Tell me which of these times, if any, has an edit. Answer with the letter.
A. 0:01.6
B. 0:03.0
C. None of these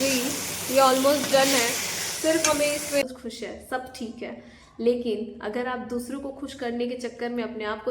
B